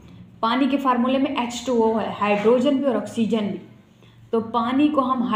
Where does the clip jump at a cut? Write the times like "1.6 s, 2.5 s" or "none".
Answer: none